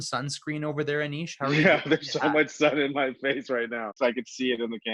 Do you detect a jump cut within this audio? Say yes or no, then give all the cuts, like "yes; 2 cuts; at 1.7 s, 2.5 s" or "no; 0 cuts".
yes; 1 cut; at 4.0 s